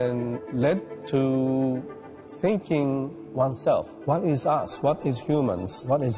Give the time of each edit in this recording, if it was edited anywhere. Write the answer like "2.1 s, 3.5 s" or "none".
none